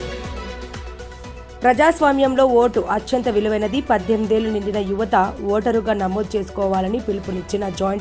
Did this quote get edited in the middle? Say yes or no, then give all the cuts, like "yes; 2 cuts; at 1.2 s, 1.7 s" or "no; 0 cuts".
yes; 1 cut; at 1.5 s